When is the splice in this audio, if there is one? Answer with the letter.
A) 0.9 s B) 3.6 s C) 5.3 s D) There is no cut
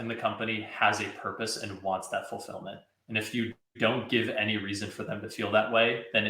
D